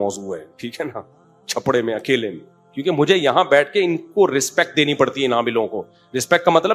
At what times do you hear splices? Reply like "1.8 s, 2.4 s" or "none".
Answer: none